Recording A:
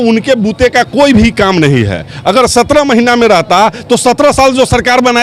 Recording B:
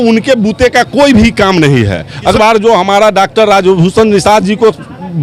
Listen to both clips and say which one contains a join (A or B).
B